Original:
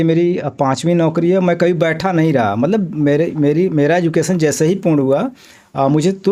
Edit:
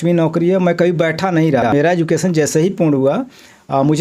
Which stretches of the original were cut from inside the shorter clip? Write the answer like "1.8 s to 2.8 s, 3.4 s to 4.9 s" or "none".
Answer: 2.5 s to 3.7 s